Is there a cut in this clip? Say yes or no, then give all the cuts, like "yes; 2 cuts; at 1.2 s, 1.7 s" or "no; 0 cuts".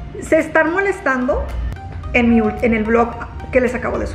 yes; 1 cut; at 1.6 s